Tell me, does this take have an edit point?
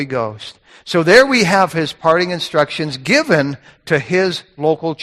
no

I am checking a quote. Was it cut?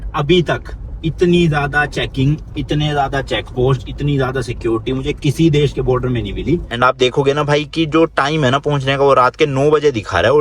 yes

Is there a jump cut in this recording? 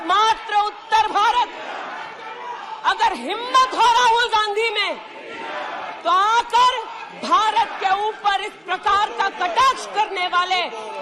no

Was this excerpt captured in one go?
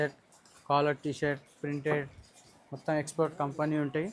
yes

